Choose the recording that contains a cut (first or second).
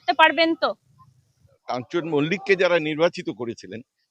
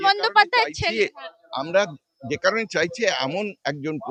first